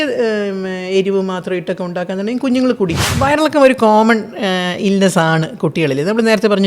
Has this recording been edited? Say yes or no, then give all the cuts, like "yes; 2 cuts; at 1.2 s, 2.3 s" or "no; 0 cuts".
yes; 1 cut; at 3.1 s